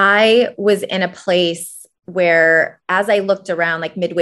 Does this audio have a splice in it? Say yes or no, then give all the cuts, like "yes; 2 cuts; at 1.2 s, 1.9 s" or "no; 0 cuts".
no; 0 cuts